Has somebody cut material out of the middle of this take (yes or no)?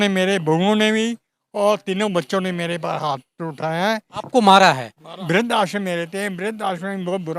yes